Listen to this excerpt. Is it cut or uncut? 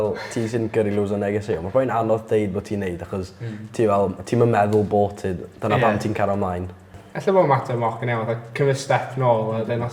uncut